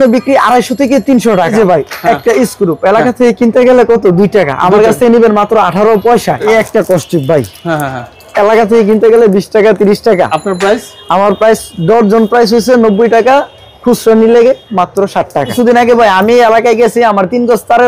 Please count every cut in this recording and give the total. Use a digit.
3